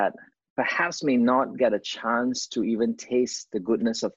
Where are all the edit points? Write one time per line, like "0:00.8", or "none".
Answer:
none